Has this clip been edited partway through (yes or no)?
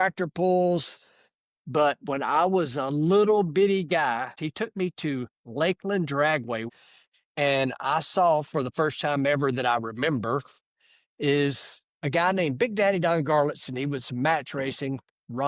yes